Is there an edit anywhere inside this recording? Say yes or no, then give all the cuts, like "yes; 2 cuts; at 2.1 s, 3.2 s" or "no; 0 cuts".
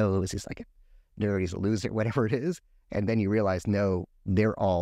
no; 0 cuts